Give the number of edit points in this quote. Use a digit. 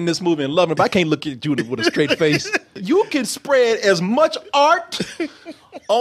1